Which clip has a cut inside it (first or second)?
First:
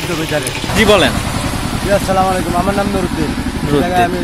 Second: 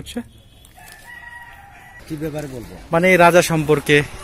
second